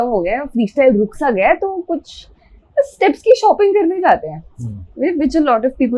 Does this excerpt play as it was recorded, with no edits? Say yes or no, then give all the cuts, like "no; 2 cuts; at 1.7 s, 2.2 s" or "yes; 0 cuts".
yes; 0 cuts